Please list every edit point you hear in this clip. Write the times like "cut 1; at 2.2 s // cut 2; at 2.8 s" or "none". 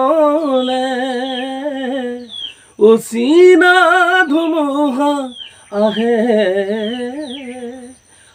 none